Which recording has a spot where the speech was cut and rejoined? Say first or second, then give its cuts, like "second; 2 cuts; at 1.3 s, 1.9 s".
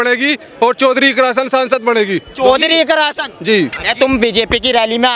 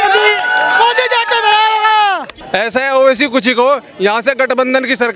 second; 1 cut; at 2.4 s